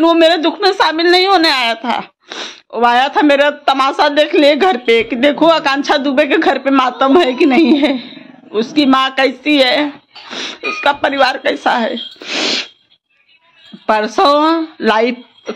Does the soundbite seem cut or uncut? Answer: uncut